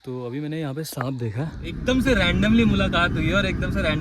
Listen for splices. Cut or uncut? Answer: cut